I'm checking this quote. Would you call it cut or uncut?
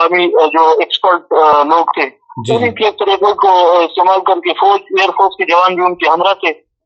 uncut